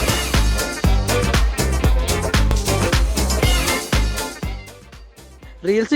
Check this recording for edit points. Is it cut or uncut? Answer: cut